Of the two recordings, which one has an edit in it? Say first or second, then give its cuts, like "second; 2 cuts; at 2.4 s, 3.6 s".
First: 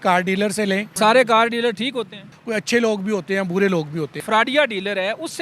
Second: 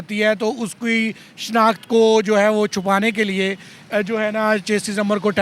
first; 3 cuts; at 0.9 s, 2.4 s, 4.2 s